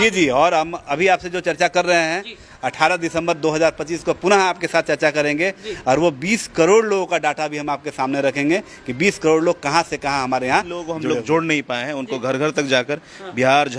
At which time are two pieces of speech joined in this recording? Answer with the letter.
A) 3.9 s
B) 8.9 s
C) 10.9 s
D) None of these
C